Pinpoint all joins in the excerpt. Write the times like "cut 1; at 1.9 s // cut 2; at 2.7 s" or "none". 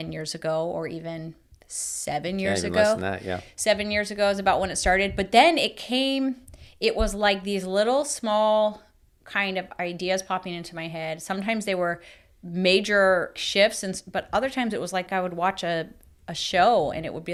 none